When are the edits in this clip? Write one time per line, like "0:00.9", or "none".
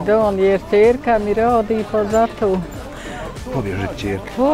none

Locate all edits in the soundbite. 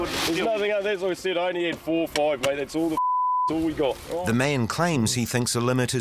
0:04.1

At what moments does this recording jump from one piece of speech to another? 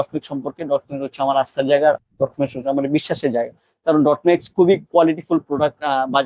none

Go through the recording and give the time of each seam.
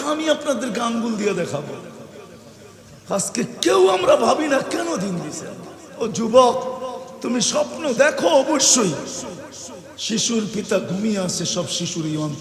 0:02.7

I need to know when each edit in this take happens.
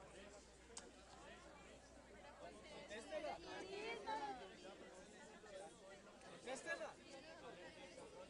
0:01.2

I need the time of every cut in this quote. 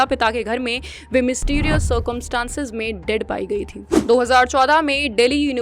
0:03.8

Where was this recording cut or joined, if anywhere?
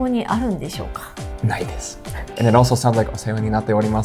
0:02.2

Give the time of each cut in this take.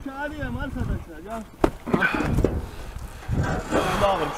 0:01.5

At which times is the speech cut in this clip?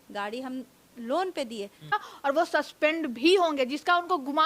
0:01.9

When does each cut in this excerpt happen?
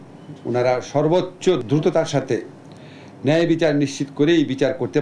0:01.6

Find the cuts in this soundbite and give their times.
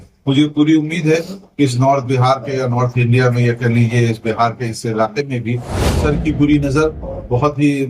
0:06.0

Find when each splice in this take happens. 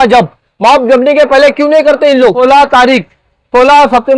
0:02.4

